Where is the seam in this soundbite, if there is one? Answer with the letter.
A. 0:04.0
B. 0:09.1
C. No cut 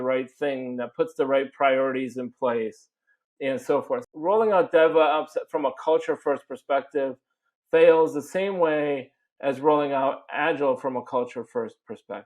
A